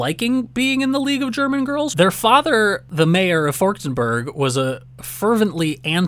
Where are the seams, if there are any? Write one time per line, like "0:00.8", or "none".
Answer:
0:01.9
0:02.8